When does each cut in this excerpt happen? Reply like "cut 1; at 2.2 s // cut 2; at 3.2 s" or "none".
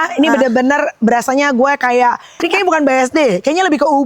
cut 1; at 2.4 s